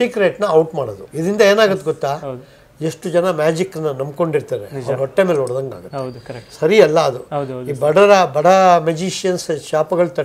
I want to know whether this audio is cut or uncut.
cut